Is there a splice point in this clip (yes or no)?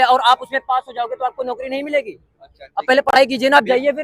no